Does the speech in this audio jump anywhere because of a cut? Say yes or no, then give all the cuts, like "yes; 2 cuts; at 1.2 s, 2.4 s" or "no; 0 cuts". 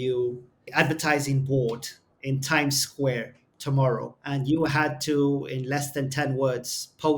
yes; 1 cut; at 4.2 s